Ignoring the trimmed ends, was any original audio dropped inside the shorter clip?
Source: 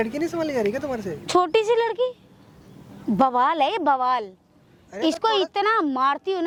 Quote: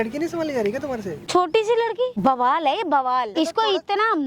yes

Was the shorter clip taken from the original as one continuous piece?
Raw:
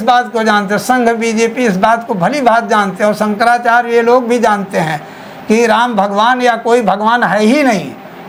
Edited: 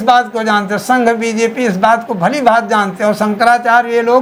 yes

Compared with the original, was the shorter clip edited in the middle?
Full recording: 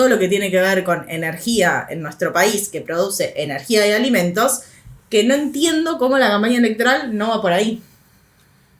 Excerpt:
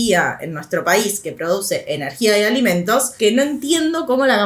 yes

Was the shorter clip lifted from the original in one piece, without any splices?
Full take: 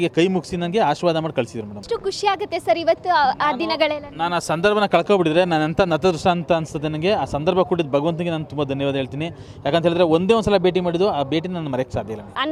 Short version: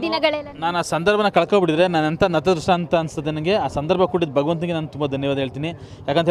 yes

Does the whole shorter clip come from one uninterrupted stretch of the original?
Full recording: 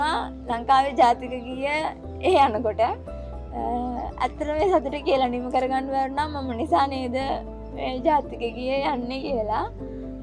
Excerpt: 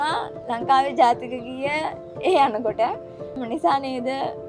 no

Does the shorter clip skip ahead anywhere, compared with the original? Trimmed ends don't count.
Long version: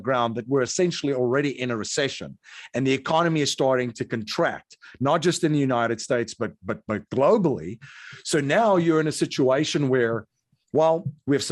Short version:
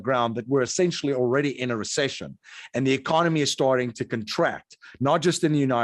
no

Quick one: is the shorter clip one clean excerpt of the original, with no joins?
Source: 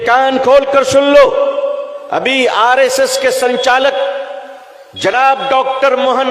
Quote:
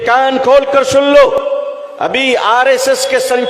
no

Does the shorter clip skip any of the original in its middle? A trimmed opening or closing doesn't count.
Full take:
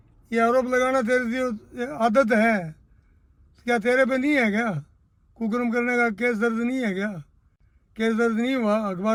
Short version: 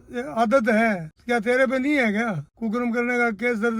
yes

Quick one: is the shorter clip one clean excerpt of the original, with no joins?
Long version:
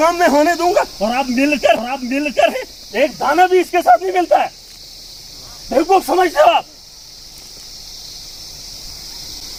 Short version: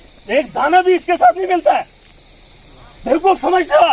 yes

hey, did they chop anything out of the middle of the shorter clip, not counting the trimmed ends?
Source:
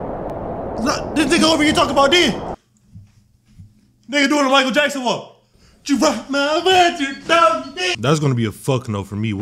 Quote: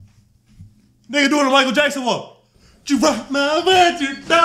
no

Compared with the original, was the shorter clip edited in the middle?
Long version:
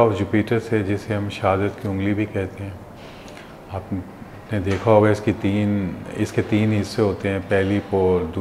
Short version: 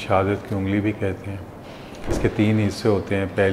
yes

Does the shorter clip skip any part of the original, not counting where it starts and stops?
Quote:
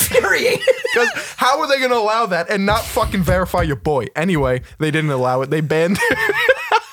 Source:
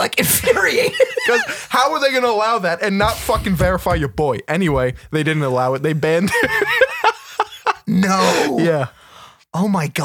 no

